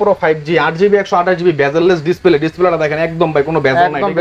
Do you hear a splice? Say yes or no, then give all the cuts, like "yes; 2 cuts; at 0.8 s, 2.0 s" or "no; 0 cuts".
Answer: no; 0 cuts